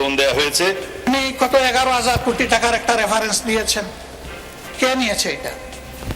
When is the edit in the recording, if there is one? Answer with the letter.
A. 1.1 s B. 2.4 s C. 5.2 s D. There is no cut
A